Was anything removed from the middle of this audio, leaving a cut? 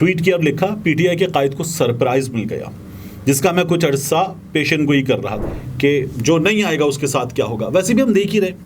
yes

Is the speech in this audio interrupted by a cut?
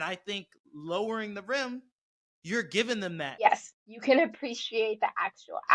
yes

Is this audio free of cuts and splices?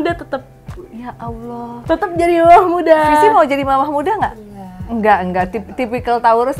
yes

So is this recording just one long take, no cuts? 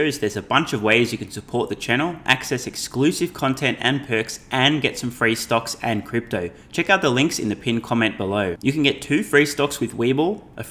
yes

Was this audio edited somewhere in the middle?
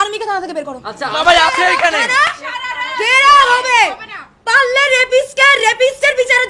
yes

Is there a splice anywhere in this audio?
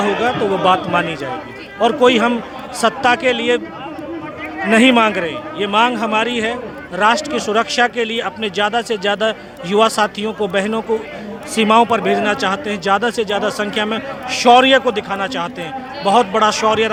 no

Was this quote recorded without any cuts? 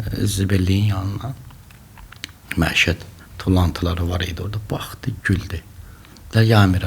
no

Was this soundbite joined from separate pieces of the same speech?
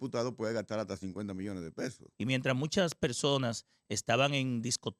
yes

